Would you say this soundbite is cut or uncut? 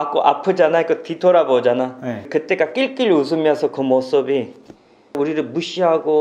cut